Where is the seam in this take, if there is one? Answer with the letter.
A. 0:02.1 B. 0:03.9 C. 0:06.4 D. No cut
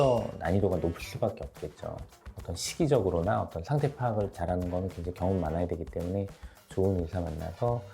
A